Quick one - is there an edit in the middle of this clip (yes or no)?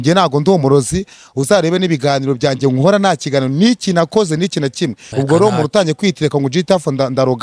yes